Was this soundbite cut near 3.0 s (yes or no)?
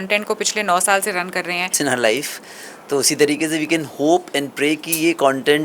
no